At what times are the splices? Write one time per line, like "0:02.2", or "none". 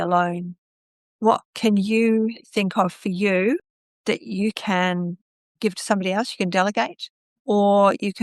none